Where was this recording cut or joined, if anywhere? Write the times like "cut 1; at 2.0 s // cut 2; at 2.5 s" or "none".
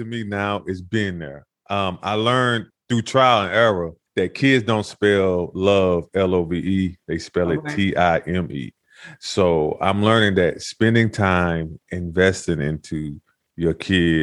cut 1; at 2.7 s // cut 2; at 4.0 s